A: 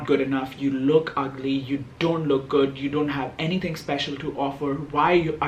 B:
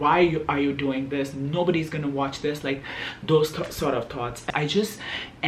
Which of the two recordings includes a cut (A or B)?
B